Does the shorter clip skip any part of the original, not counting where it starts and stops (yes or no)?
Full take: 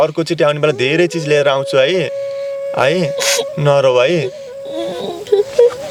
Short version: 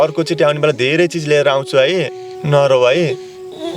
yes